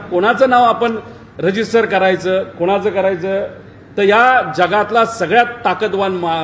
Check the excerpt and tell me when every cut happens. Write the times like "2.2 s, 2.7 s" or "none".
none